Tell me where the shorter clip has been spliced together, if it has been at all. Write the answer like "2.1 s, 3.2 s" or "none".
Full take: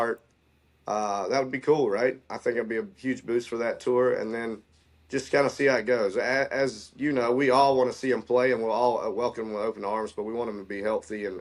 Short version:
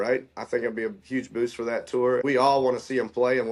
2.2 s

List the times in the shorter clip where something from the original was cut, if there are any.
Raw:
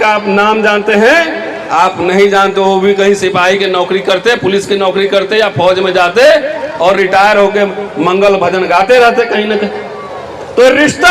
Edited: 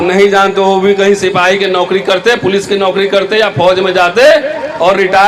none

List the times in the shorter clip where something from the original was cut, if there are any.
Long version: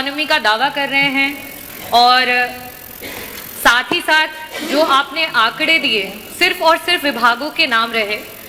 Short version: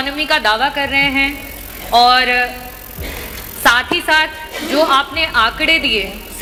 none

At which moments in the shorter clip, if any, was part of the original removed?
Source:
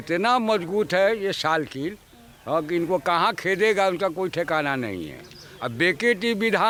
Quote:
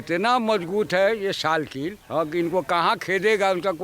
2.0 s

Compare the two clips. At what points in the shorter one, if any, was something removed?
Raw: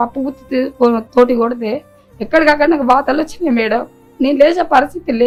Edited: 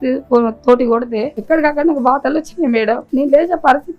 1.3 s, 3.0 s

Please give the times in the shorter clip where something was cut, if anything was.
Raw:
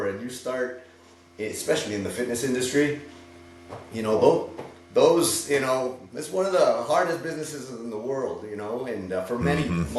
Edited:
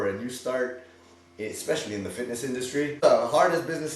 3.0 s

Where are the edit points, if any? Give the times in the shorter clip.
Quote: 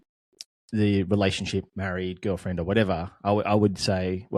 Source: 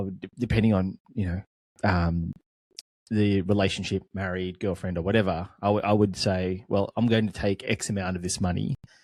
none

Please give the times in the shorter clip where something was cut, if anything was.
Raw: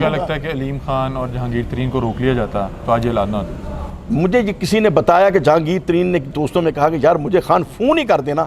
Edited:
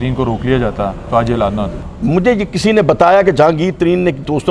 1.8 s

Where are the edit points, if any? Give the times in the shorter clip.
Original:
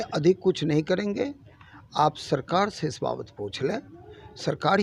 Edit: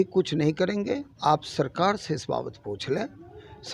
1.1 s

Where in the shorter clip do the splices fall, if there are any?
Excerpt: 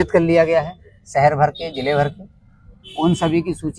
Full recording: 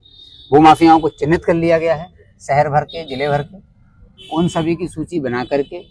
none

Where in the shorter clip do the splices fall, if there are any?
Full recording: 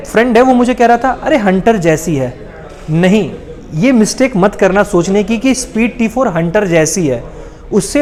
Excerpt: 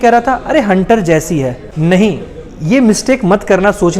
1.6 s

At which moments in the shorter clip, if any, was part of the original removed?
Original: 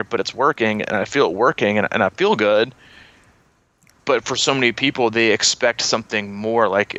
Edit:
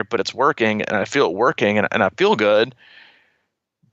none

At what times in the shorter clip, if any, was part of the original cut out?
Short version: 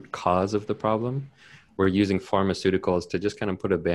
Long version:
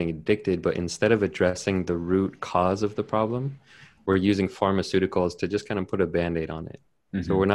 none

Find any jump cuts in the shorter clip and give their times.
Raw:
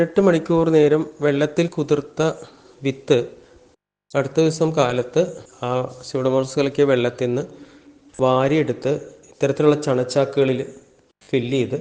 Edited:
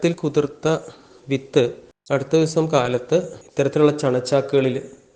1.9 s, 3.4 s

